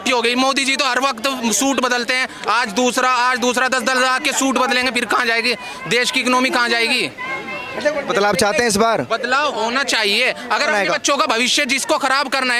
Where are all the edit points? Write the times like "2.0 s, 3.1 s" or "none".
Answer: none